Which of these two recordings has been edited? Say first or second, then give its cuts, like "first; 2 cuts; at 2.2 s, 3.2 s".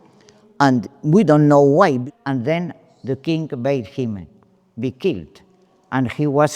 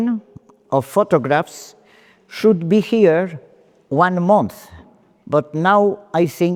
first; 1 cut; at 2.0 s